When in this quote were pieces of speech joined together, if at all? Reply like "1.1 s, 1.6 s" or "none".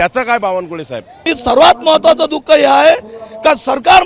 1.3 s